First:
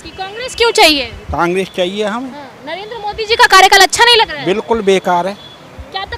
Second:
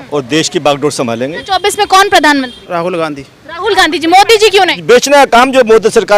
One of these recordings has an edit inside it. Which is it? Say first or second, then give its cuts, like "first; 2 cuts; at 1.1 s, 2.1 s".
second; 3 cuts; at 1.4 s, 2.6 s, 4.8 s